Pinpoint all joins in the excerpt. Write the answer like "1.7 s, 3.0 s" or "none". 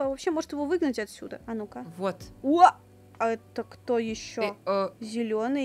1.4 s, 4.6 s